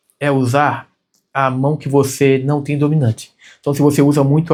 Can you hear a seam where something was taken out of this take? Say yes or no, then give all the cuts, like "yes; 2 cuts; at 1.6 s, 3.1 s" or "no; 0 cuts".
no; 0 cuts